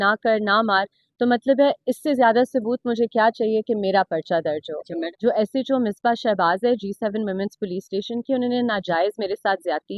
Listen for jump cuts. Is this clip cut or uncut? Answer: cut